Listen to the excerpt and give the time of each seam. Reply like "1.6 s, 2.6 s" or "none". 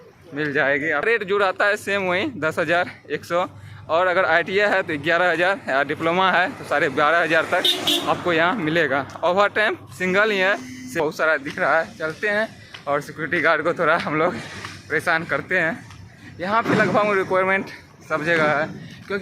1.0 s, 11.0 s